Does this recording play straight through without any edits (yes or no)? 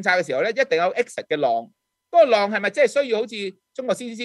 yes